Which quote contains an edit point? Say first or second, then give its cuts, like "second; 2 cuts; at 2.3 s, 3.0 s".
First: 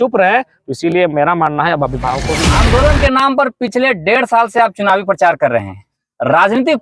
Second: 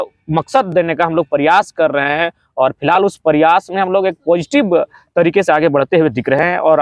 first; 1 cut; at 2.3 s